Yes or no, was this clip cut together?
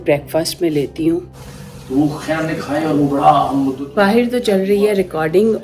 yes